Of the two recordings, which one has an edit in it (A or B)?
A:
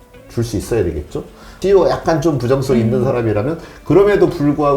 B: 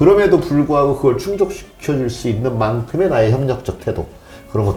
A